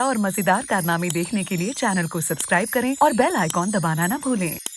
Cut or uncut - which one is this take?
uncut